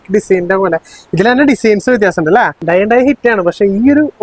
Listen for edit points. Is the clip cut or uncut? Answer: cut